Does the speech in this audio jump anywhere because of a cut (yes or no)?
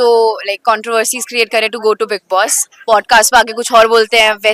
no